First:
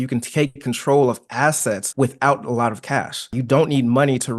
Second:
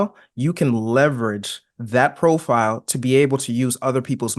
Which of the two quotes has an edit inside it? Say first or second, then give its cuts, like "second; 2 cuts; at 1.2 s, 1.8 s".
first; 2 cuts; at 1.9 s, 3.4 s